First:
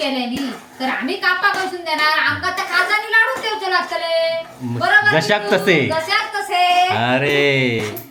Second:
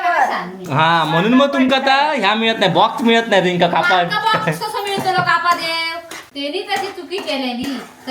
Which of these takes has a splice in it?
second; 1 cut; at 6.2 s

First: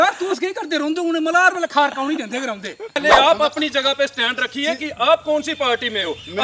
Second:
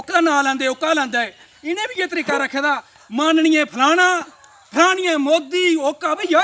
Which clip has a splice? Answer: first; 1 cut; at 3.0 s

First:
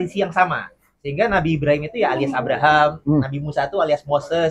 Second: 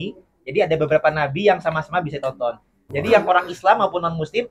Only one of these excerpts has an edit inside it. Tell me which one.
second; 1 cut; at 2.8 s

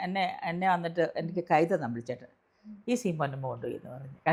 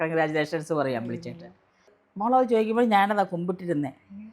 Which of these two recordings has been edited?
second; 1 cut; at 1.9 s

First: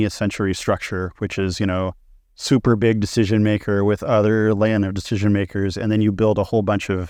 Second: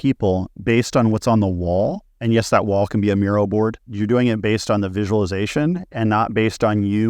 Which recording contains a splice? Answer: second; 2 cuts; at 2.1 s, 3.9 s

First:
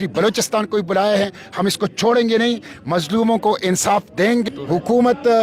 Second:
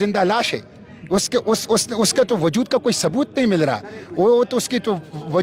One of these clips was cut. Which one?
first; 1 cut; at 4.5 s

